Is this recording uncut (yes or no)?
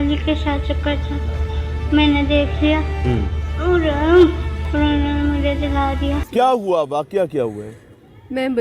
no